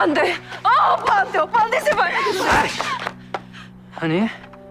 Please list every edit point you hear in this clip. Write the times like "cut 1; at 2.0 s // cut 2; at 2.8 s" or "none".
none